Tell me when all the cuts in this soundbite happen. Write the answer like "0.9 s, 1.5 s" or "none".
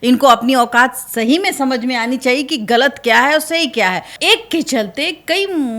4.1 s